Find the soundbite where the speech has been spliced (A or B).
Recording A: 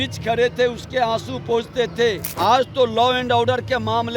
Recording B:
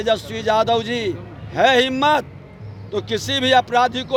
A